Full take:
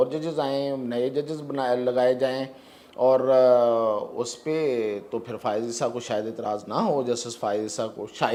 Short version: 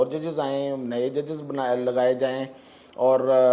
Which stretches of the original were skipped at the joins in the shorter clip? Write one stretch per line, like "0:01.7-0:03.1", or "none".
none